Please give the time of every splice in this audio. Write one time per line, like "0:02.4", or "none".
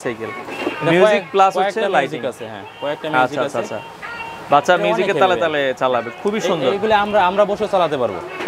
none